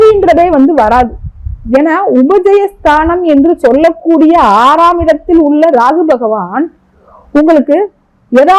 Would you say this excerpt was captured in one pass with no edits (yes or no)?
yes